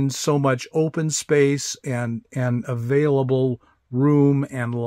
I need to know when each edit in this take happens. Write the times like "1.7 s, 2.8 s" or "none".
none

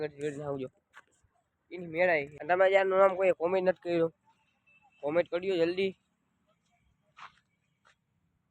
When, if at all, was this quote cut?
2.3 s

